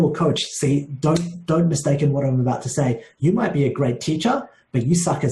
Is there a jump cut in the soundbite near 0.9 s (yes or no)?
no